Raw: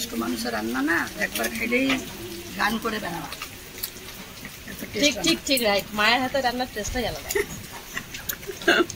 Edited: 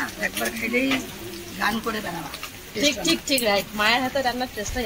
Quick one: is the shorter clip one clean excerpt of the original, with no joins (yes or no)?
no